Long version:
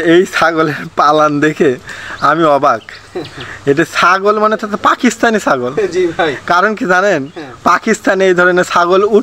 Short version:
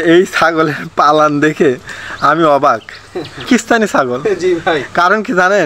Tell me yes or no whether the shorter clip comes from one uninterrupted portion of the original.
no